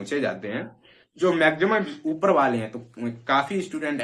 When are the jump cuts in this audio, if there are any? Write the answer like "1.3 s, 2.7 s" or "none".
1.9 s